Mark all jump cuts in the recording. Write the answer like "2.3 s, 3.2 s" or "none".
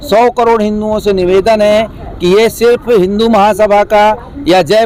none